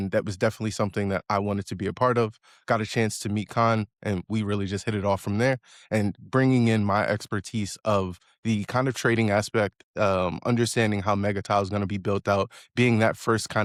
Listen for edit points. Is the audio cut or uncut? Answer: uncut